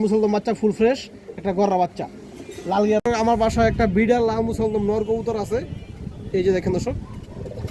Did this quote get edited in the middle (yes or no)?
yes